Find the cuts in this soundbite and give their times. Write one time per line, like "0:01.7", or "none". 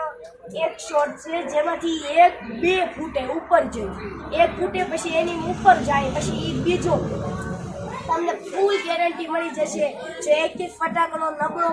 0:08.0